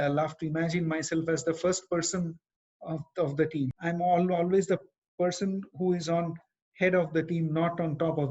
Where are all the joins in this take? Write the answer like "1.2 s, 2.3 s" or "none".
3.7 s